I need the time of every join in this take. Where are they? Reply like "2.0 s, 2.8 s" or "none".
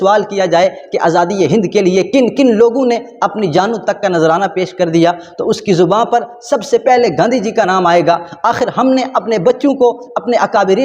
none